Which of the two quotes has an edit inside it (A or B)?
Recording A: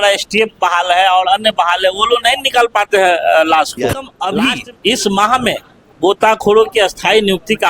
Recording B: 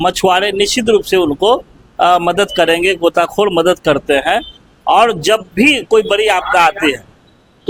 A